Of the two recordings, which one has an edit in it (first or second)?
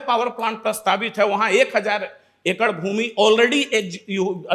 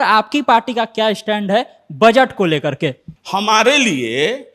second